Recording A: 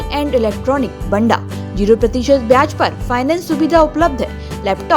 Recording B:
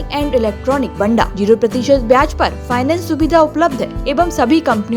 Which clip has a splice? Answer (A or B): B